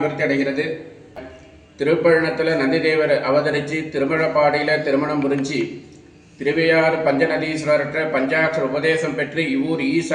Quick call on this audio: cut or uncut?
cut